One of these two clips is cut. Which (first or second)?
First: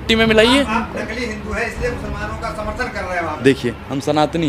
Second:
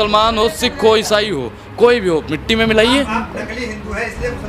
first